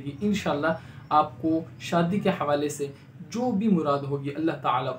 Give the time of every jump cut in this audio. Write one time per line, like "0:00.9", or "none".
none

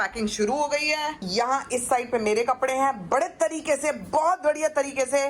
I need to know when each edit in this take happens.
0:01.2

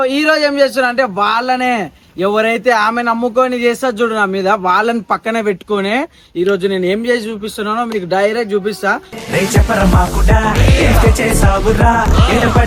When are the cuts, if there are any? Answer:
none

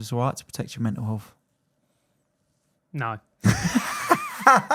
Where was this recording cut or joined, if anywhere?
none

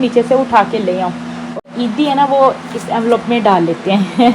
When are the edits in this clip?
0:01.6

